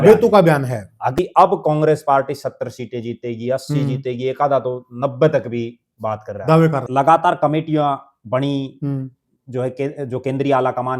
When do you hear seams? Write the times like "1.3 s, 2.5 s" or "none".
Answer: 1.2 s, 6.9 s